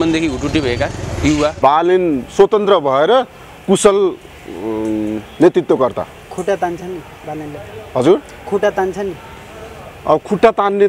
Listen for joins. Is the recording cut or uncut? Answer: cut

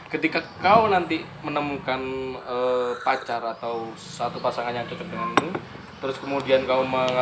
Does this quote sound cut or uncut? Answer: uncut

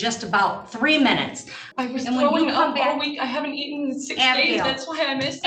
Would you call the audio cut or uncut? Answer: cut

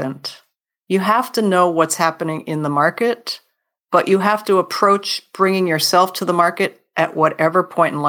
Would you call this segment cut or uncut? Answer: uncut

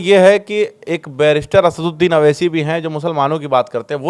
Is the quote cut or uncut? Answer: uncut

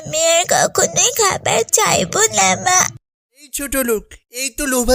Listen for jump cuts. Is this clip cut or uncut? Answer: cut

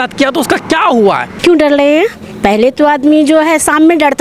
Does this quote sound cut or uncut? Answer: cut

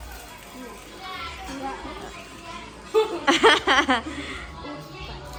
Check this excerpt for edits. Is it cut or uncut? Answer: uncut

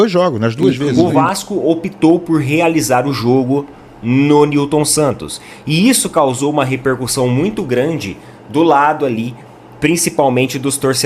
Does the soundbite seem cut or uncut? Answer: cut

